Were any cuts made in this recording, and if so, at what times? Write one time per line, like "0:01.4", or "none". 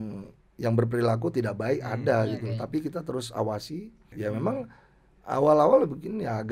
0:04.1